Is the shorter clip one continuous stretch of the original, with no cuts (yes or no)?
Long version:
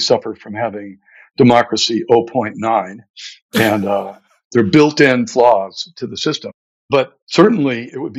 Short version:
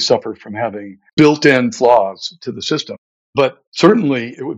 no